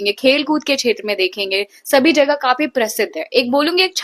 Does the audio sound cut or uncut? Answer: uncut